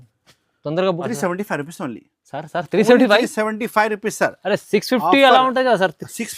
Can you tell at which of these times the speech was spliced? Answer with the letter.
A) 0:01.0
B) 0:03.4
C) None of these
A